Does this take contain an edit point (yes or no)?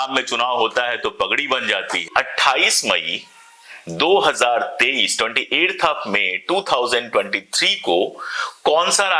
yes